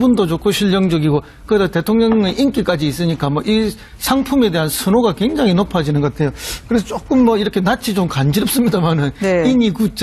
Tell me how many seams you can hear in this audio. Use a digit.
1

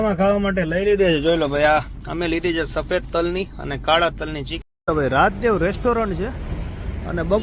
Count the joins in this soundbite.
1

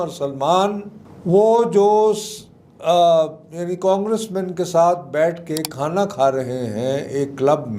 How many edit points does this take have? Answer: 0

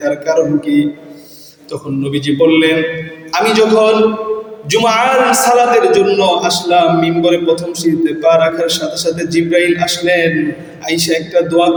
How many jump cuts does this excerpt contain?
0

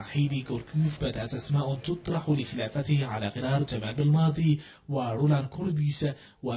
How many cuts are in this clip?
0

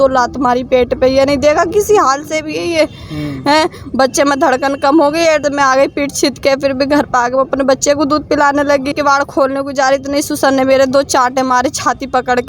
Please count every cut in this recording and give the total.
2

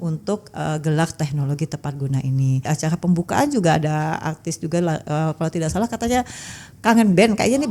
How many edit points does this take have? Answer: 1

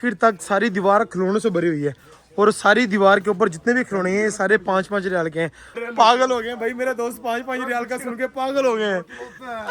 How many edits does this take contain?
1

